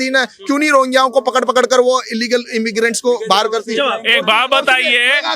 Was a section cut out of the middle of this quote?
no; 0 cuts

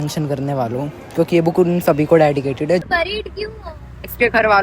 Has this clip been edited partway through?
yes; 1 cut; at 2.8 s

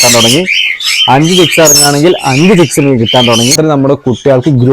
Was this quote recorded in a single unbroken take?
no; 1 cut; at 3.5 s

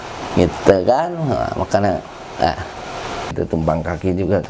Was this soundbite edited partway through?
yes; 1 cut; at 3.3 s

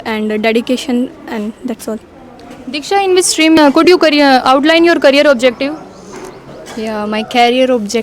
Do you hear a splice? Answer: yes; 1 cut; at 3.6 s

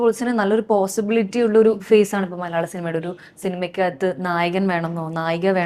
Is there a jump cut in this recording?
no; 0 cuts

